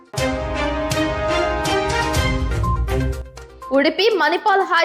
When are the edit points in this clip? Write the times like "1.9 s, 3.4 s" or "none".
3.2 s